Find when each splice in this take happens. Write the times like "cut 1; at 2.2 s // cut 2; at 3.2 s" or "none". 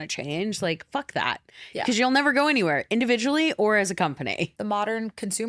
cut 1; at 4.5 s